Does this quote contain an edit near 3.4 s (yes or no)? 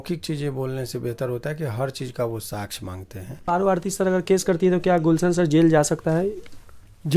yes